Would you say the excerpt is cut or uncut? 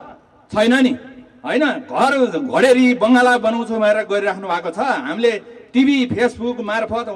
uncut